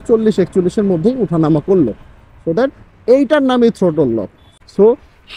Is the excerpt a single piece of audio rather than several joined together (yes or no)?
no